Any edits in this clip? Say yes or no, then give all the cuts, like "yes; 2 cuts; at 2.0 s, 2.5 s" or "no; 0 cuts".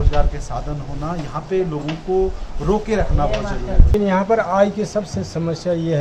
yes; 1 cut; at 3.9 s